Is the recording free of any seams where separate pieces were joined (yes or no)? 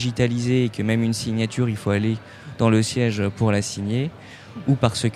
yes